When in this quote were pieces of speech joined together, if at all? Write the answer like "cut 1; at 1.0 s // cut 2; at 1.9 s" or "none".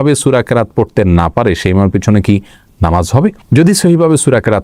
none